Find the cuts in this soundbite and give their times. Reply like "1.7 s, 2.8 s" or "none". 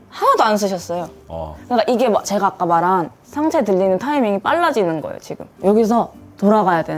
none